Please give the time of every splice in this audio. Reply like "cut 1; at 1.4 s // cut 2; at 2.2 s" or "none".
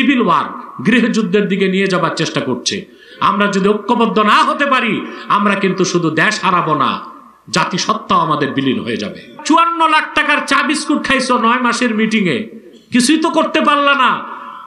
cut 1; at 9.4 s